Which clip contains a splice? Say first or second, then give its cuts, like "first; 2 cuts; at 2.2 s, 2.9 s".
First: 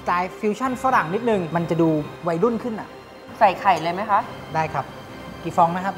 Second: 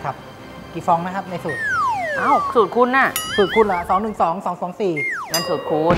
first; 2 cuts; at 1.5 s, 3.2 s